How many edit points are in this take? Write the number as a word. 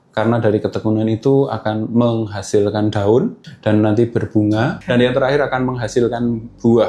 two